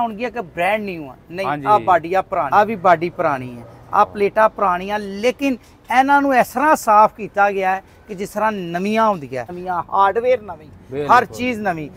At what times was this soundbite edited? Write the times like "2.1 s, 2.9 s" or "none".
2.5 s, 9.6 s

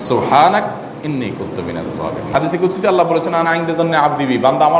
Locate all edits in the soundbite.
2.3 s

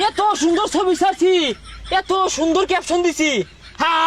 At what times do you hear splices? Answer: none

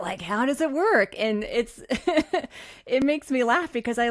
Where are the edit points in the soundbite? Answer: none

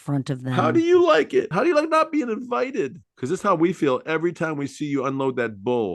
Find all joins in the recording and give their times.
1.5 s

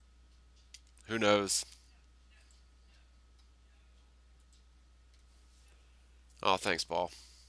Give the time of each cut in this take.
none

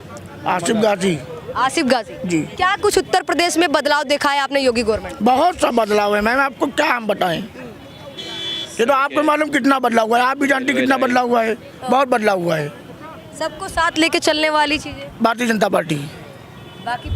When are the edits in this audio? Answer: 2.5 s

